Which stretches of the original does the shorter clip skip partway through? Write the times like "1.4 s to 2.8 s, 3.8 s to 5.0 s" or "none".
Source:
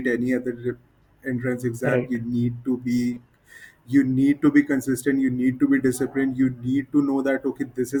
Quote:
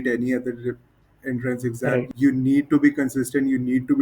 2.1 s to 3.8 s